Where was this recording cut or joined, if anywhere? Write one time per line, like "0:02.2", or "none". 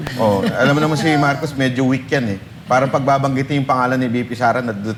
none

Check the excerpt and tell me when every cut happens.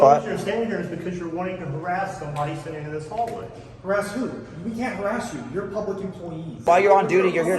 0:06.6

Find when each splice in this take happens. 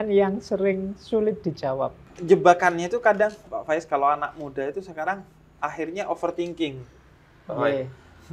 0:02.1

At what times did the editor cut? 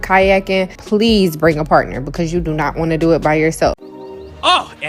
0:03.8

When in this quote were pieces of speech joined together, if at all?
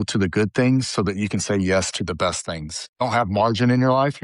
0:03.0

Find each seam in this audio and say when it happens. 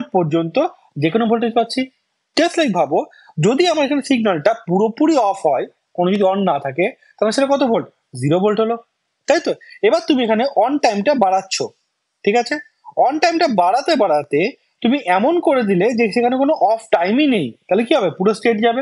none

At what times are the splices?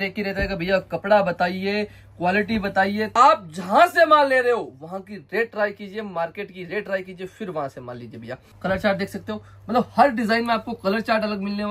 0:03.1
0:08.5

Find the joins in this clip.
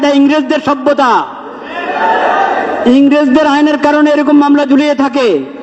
none

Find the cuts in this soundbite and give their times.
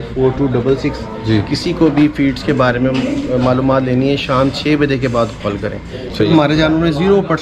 0:06.3

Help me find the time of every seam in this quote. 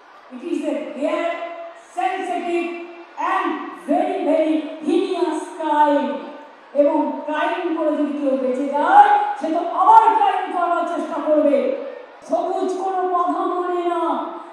0:12.1

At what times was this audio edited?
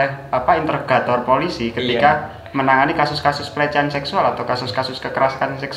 none

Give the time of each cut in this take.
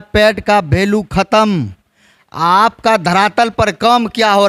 none

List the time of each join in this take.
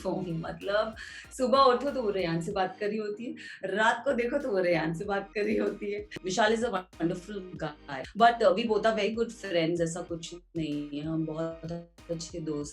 0:06.1
0:08.1

